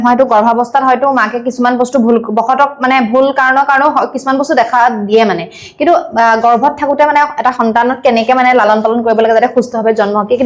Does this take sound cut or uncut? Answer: uncut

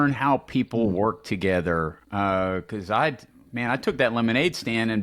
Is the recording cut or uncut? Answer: uncut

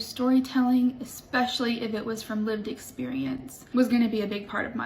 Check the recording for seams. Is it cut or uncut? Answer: cut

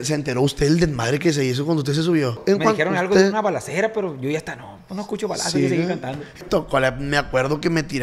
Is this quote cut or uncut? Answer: cut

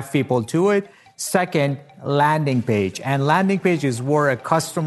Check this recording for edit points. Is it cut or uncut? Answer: cut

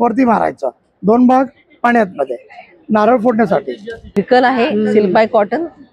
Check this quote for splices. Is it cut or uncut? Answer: cut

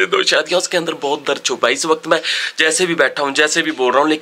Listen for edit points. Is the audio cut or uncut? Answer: uncut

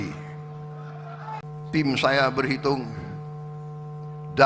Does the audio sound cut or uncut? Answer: cut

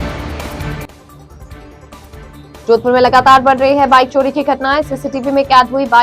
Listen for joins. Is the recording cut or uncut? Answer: cut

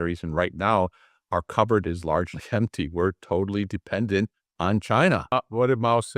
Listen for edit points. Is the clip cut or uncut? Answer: cut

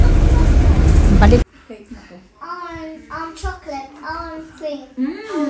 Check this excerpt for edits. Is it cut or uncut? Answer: cut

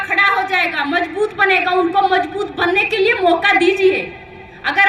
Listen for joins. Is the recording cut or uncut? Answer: uncut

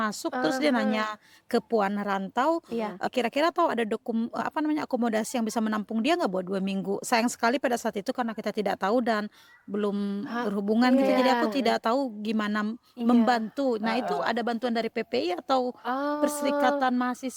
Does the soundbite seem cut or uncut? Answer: uncut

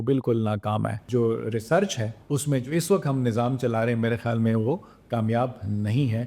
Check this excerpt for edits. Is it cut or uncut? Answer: cut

